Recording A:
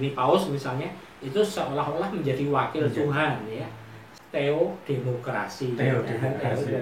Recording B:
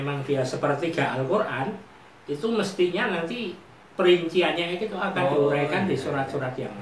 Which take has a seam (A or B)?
A